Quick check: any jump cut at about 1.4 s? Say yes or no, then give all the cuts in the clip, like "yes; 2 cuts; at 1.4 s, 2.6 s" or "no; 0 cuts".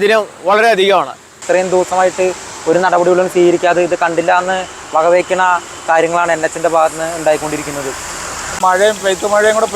yes; 2 cuts; at 1.4 s, 8.5 s